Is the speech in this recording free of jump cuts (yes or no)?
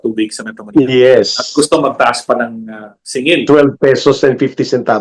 yes